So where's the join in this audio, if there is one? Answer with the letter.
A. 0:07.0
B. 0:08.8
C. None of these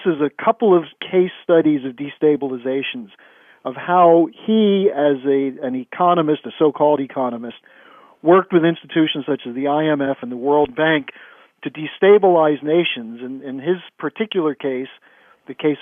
C